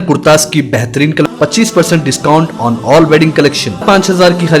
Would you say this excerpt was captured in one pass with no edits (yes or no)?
no